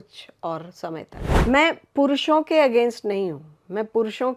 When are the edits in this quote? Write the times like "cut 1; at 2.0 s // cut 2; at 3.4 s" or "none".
cut 1; at 1.2 s